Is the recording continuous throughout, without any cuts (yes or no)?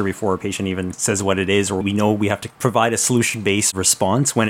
yes